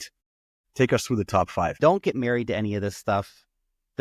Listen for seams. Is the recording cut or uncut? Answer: cut